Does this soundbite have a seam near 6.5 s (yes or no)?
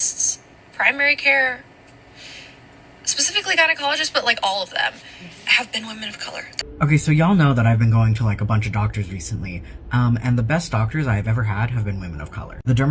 yes